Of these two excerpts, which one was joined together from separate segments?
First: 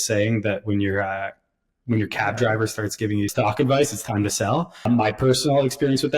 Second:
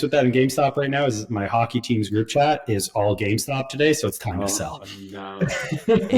first; 2 cuts; at 3.3 s, 4.9 s

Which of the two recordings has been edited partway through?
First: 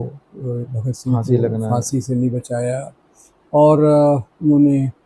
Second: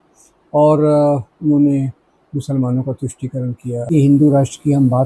second; 1 cut; at 3.9 s

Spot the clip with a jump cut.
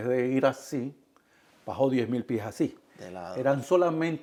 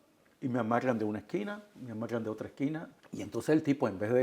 second; 1 cut; at 3.0 s

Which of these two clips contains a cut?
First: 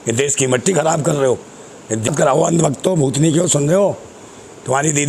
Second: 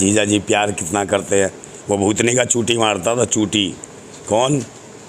first; 1 cut; at 2.1 s

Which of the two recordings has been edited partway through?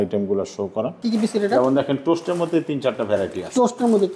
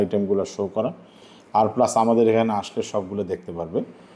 first; 1 cut; at 0.9 s

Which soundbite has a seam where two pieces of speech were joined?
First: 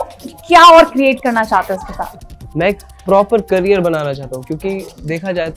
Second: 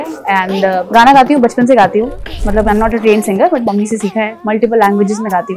second; 2 cuts; at 0.8 s, 2.4 s

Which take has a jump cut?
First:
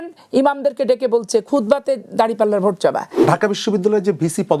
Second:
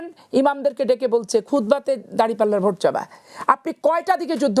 first; 1 cut; at 3.1 s

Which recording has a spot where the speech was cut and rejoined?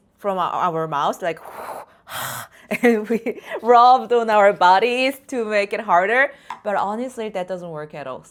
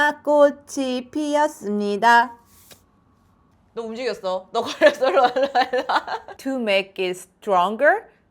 second; 1 cut; at 6.2 s

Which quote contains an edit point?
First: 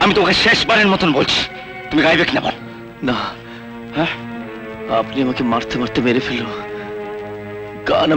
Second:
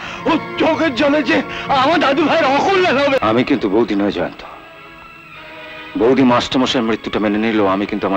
second; 1 cut; at 3.2 s

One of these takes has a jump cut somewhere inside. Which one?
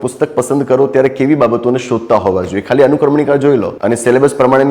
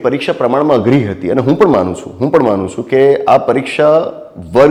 first; 1 cut; at 3.7 s

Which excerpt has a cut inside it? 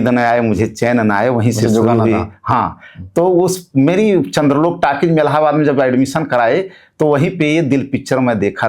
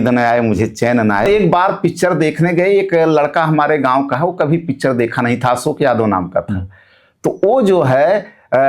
second; 1 cut; at 1.2 s

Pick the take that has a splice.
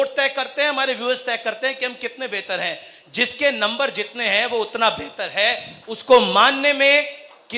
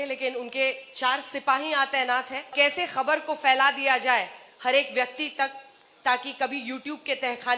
second; 1 cut; at 2.5 s

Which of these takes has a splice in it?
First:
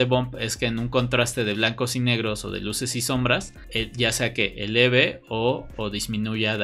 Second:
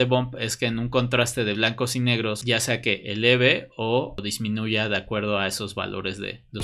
second; 2 cuts; at 2.4 s, 4.2 s

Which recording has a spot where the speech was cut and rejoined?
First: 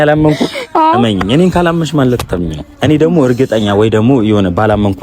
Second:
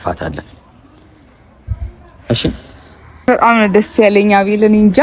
second; 1 cut; at 3.3 s

